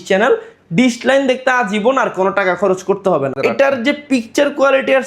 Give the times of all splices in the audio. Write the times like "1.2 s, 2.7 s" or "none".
3.4 s